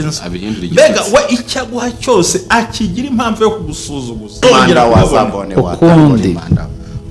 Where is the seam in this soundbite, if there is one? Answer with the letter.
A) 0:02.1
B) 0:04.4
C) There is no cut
B